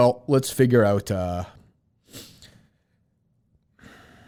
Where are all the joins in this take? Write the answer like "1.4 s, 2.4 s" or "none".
none